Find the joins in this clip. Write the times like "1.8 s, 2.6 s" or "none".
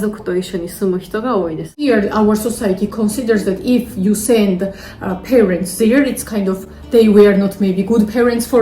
1.8 s